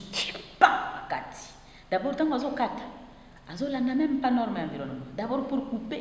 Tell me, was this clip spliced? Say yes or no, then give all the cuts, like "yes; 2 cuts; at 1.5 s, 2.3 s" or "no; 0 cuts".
no; 0 cuts